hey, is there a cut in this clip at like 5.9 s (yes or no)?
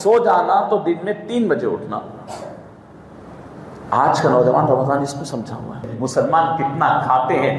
yes